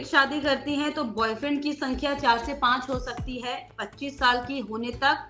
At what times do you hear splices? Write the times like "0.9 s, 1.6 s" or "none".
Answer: none